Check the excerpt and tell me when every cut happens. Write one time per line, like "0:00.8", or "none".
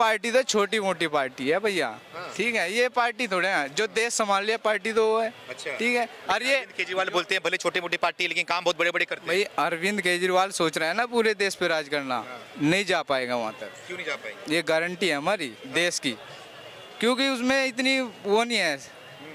none